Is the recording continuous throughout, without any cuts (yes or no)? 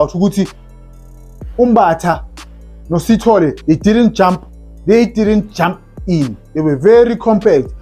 yes